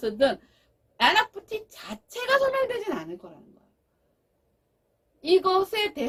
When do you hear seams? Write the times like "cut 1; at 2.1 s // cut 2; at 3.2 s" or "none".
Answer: none